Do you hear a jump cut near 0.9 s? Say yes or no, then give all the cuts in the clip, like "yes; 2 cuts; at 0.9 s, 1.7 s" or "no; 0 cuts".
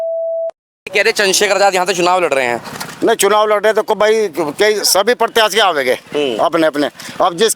yes; 1 cut; at 0.9 s